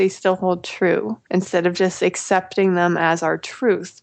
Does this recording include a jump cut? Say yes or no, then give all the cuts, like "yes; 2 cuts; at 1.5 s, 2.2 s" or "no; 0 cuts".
no; 0 cuts